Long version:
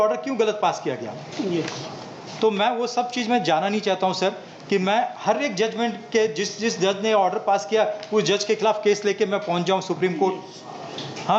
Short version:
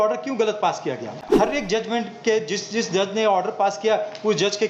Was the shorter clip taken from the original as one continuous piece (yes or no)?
no